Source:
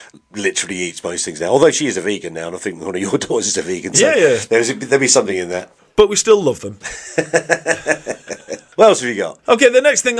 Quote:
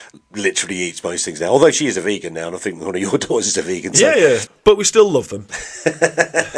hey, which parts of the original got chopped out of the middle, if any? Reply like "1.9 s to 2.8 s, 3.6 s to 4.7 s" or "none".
4.4 s to 5.8 s

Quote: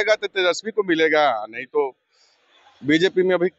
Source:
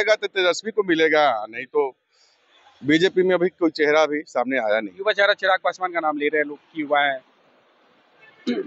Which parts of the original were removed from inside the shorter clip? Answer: none

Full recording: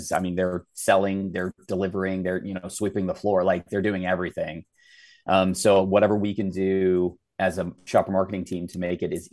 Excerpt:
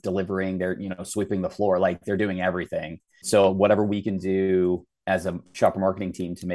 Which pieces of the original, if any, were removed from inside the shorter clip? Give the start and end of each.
4.9 s to 5.6 s

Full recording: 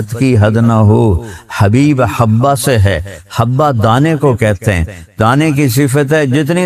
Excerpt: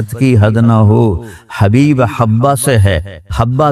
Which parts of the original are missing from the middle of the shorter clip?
none

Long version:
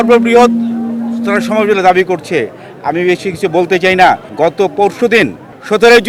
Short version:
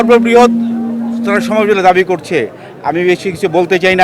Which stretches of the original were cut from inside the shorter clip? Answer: none

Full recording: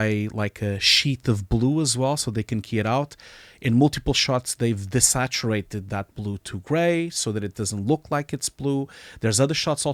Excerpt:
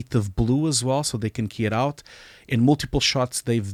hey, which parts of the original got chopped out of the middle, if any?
none

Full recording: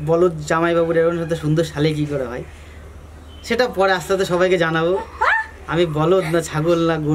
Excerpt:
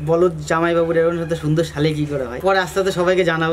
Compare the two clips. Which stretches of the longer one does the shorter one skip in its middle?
2.4 s to 3.7 s

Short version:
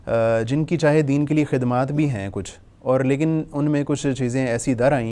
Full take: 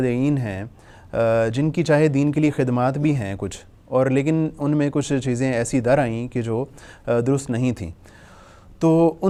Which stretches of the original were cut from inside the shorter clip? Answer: none

